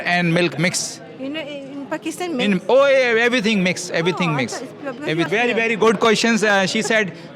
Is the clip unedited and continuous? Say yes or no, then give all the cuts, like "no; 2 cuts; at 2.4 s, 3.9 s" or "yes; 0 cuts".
no; 1 cut; at 5.3 s